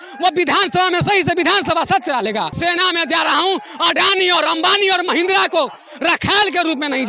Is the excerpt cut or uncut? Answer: cut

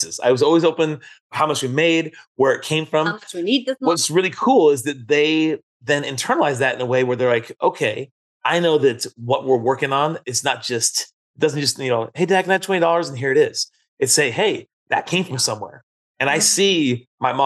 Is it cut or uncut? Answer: uncut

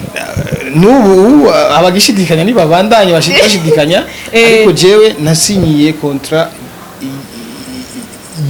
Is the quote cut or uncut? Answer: uncut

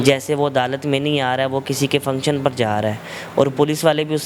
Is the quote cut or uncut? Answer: uncut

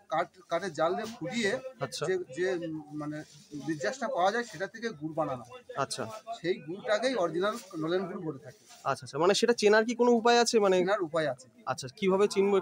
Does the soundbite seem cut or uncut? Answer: uncut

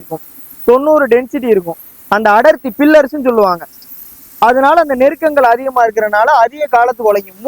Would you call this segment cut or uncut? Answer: uncut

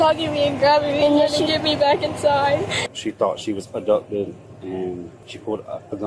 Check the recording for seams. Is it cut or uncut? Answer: cut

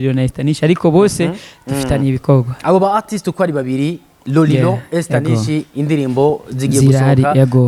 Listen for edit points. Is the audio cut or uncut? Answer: uncut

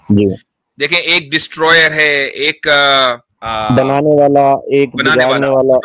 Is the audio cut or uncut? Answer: cut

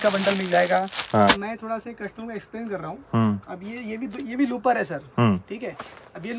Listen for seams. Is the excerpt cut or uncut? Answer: cut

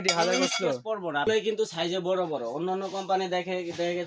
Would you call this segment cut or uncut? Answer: cut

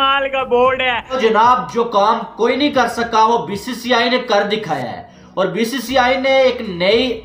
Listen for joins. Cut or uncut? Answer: cut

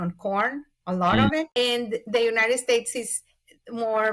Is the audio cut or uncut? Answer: cut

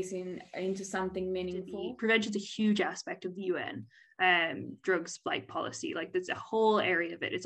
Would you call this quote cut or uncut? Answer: cut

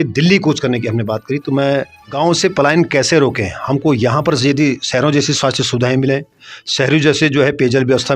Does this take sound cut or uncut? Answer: cut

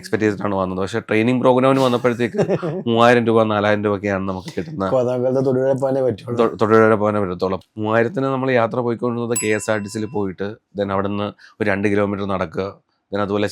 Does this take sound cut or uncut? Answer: cut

